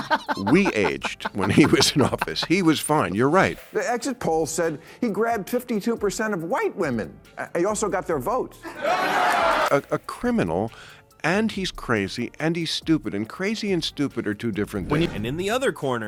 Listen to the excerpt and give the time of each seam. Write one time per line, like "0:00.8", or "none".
none